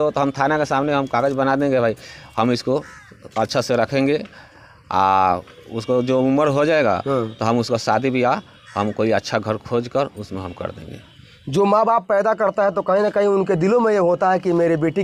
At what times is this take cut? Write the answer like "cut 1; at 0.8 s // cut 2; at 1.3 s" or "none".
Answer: none